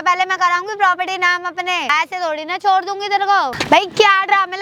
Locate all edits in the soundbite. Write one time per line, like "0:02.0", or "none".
0:01.9
0:03.6